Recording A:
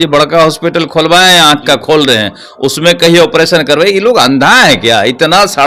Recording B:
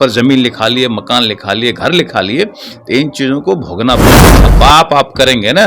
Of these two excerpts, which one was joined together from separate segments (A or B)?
B